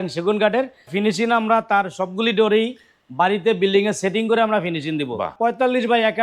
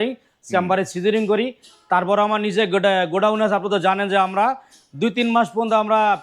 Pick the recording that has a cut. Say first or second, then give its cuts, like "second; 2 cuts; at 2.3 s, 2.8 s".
first; 2 cuts; at 0.9 s, 5.3 s